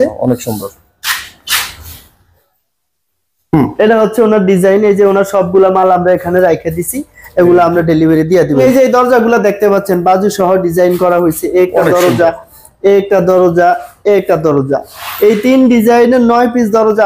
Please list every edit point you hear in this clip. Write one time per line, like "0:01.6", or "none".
0:08.6